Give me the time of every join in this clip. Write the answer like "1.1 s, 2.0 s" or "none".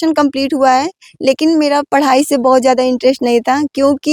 none